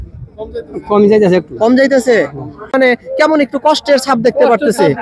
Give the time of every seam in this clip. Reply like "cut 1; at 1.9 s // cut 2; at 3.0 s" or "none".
cut 1; at 2.7 s

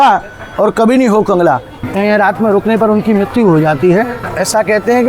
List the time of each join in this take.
cut 1; at 1.8 s // cut 2; at 4.2 s

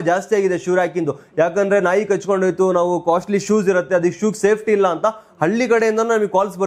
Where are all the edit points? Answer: none

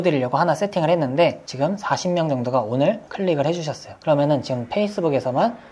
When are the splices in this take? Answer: cut 1; at 1.4 s

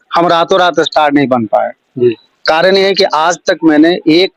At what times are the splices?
none

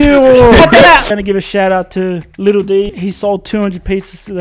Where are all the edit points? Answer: cut 1; at 1.1 s // cut 2; at 2.3 s // cut 3; at 2.9 s

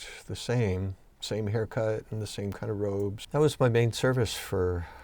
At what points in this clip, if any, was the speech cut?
cut 1; at 1.1 s // cut 2; at 3.2 s

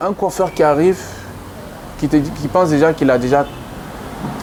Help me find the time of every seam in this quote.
none

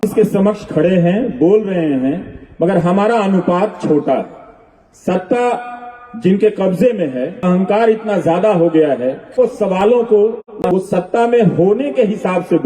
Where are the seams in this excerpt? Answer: cut 1; at 7.4 s // cut 2; at 9.3 s

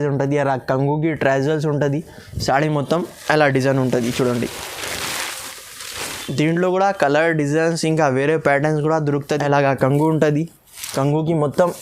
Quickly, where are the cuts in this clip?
cut 1; at 9.4 s

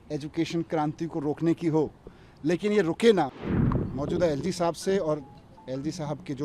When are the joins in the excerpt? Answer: cut 1; at 3.6 s

